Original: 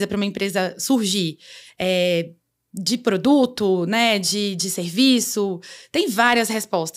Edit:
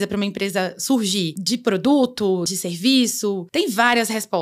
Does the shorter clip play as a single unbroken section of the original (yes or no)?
no